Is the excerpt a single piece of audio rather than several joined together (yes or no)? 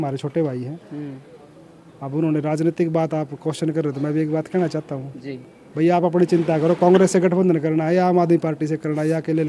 yes